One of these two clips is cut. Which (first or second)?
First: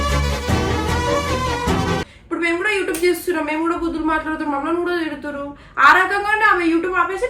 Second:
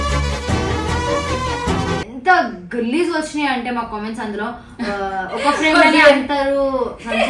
second